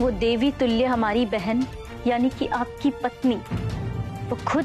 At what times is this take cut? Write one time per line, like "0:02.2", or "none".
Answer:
0:01.8

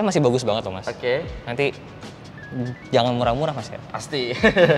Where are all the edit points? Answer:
none

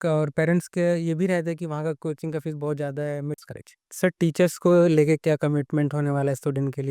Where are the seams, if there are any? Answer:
0:03.4

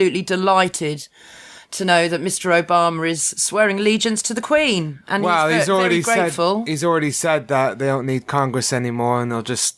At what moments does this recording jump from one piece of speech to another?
none

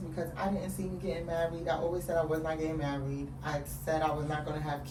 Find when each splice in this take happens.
none

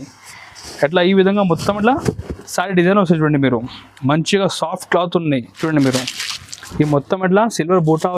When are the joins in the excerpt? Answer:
0:05.5

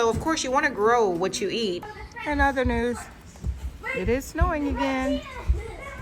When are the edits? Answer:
0:01.8

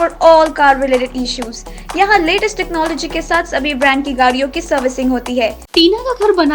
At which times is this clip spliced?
0:05.6

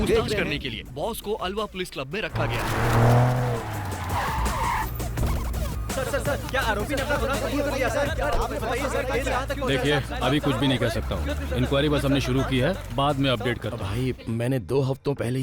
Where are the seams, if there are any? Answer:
0:13.8

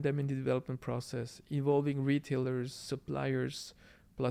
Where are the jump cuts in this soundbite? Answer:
none

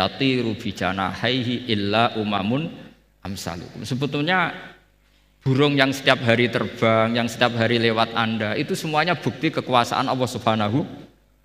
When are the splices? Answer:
none

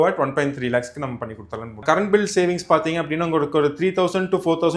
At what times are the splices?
0:01.8

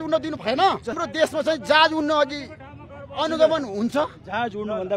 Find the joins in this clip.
0:01.0

